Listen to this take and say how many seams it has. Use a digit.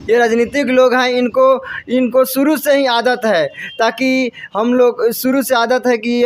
0